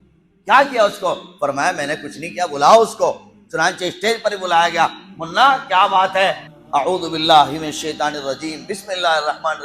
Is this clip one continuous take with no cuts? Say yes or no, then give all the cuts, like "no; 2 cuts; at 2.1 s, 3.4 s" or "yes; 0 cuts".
no; 1 cut; at 6.5 s